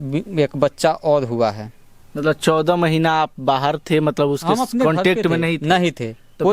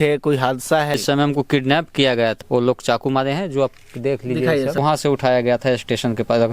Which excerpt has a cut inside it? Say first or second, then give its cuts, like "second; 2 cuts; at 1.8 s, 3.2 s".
second; 3 cuts; at 1.0 s, 2.4 s, 4.8 s